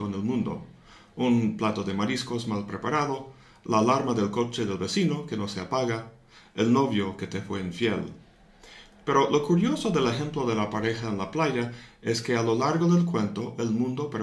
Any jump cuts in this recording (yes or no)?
yes